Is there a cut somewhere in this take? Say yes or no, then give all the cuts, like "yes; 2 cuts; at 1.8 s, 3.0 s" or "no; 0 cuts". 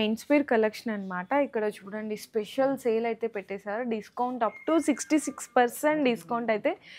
no; 0 cuts